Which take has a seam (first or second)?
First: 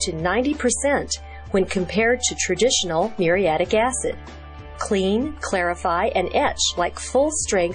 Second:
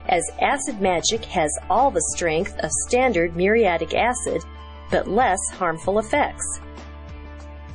second